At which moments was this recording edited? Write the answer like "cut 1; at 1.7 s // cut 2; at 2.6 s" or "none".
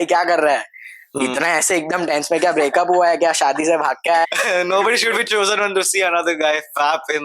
cut 1; at 4.2 s